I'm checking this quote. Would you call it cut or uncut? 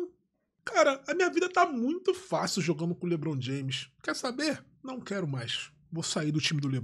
uncut